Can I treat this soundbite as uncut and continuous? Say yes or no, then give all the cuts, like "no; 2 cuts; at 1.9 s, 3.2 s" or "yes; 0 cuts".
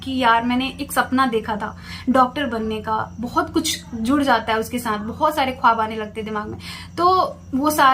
yes; 0 cuts